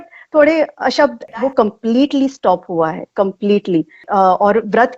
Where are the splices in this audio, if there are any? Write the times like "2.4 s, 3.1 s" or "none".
1.2 s, 4.0 s